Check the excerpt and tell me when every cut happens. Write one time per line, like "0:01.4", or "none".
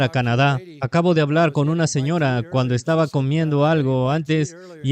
none